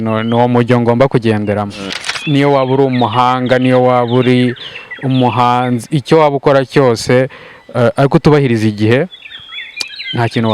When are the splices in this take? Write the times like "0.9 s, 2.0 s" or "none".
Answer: 1.8 s

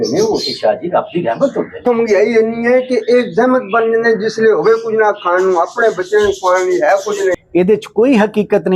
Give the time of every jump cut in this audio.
1.8 s, 7.4 s

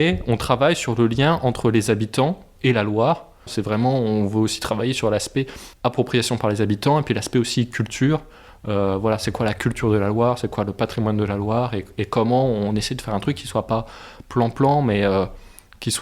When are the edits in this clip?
2.5 s, 3.5 s

